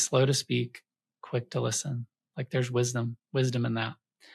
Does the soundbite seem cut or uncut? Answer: uncut